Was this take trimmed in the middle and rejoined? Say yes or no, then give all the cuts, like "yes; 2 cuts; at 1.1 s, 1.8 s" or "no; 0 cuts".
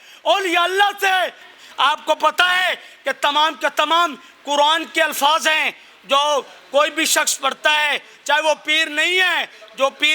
yes; 1 cut; at 1.5 s